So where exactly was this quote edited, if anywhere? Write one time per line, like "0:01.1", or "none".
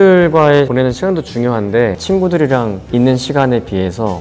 0:02.0